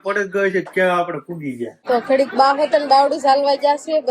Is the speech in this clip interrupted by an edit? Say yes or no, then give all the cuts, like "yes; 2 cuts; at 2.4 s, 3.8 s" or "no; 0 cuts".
yes; 1 cut; at 1.8 s